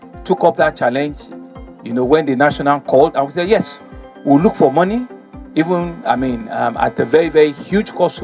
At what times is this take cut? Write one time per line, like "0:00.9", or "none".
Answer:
none